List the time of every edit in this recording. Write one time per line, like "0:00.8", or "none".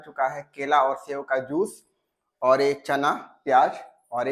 none

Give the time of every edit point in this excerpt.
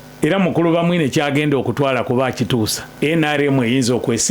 0:02.8

